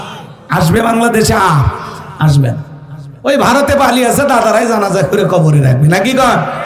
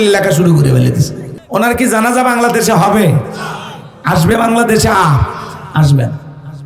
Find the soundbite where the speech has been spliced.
second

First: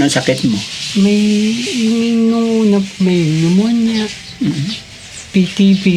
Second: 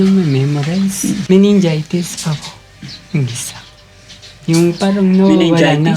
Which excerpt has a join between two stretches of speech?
second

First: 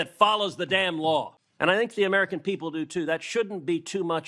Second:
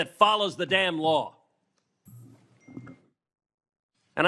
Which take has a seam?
first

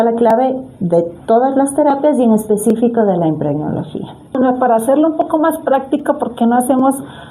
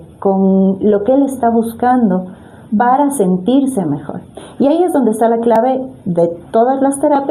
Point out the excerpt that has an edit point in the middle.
first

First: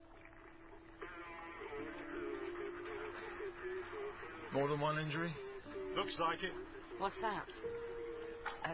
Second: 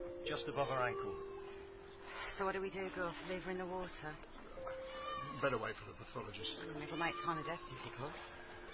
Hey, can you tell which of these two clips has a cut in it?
first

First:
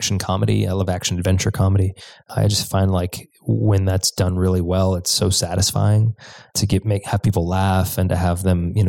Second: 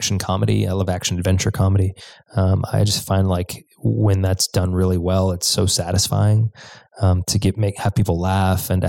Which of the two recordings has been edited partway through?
first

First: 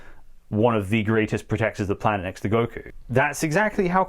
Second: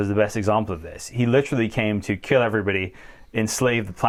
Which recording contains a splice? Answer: first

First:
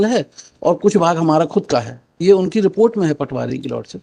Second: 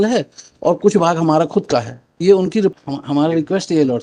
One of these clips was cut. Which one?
second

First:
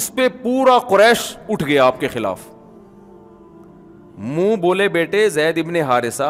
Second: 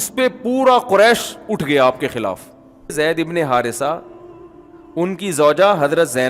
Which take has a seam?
second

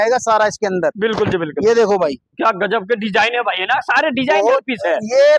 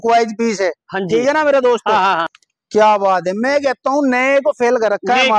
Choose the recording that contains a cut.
second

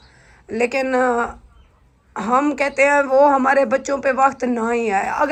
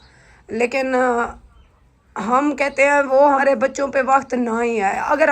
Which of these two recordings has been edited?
second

